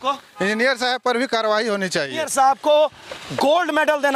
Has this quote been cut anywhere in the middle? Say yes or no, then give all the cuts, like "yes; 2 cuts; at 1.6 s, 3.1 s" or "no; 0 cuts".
yes; 1 cut; at 2.2 s